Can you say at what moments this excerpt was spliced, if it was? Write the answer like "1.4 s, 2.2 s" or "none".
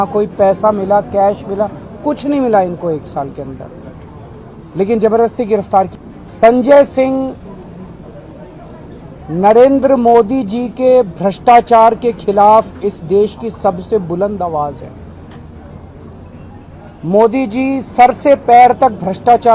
5.9 s